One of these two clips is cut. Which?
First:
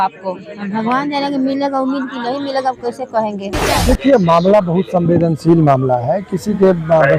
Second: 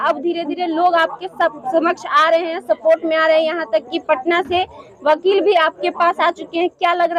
first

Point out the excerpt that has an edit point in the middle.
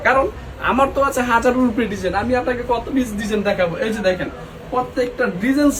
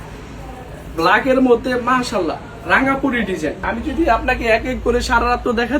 second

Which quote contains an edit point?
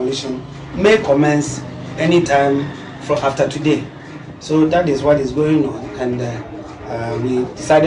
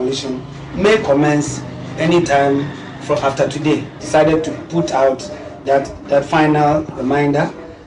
second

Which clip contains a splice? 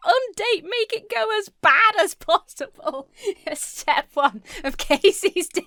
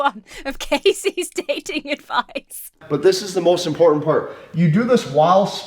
second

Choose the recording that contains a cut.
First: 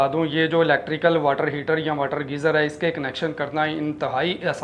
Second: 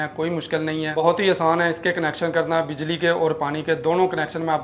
second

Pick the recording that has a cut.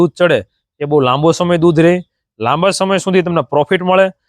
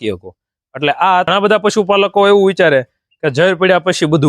second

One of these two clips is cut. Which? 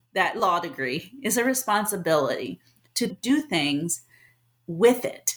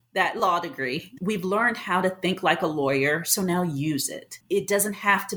second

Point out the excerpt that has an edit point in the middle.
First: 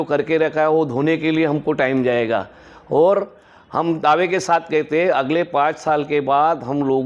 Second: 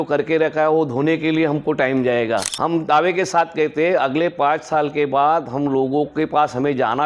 second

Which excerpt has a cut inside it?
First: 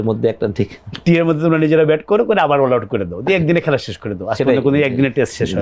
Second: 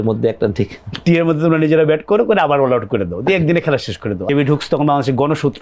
second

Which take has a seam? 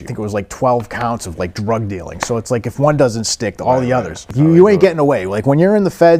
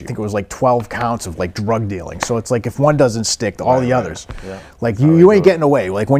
first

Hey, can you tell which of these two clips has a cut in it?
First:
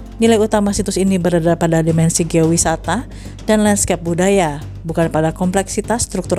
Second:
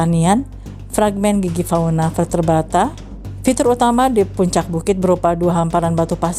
second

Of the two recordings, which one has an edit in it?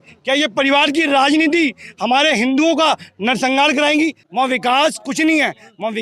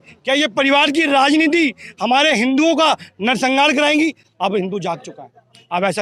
first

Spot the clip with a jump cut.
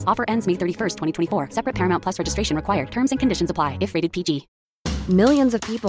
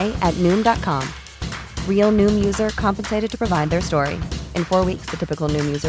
first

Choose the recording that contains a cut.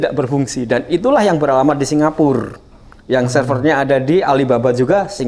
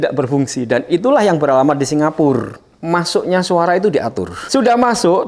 second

